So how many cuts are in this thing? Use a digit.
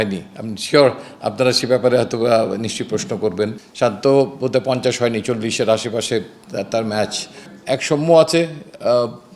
2